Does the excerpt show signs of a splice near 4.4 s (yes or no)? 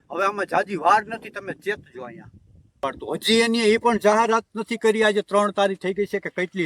no